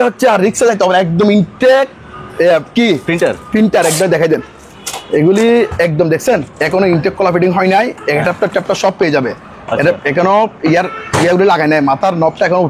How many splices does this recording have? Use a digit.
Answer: 0